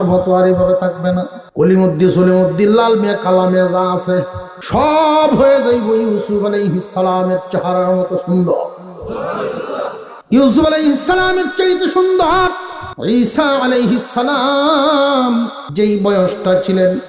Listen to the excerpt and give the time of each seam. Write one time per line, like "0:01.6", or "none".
0:15.6